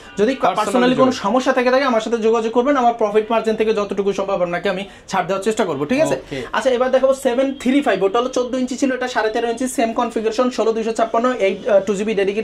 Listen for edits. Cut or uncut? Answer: uncut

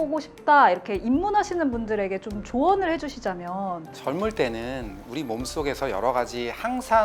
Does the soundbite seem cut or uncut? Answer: uncut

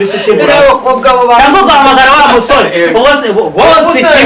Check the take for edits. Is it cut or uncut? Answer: uncut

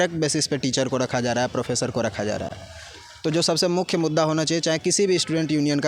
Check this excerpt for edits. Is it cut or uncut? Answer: uncut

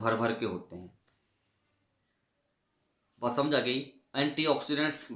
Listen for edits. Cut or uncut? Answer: uncut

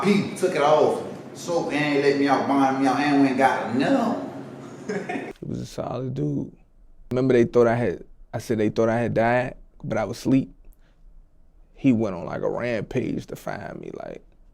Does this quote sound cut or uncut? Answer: cut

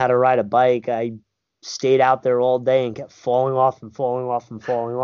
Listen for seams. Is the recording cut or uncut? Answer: uncut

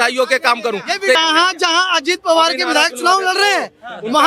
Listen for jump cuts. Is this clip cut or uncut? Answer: cut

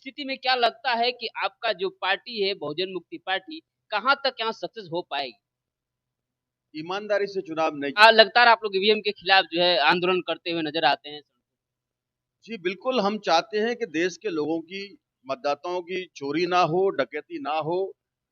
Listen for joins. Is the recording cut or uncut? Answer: cut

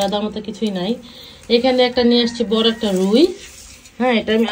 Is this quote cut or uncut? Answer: uncut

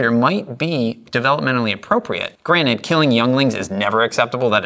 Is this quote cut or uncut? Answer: cut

